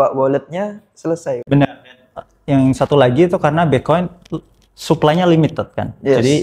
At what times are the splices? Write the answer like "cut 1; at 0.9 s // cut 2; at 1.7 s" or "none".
none